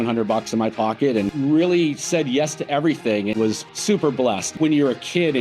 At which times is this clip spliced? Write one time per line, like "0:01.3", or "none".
0:01.3
0:03.4
0:04.5